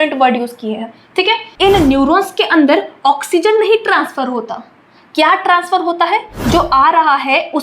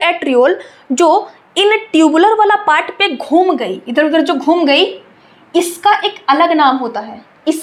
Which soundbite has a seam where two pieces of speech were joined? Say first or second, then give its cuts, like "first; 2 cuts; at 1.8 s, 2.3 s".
first; 2 cuts; at 1.6 s, 6.3 s